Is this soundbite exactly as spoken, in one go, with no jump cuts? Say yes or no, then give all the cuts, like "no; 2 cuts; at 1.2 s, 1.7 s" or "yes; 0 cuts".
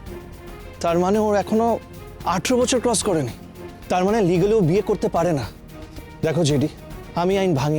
yes; 0 cuts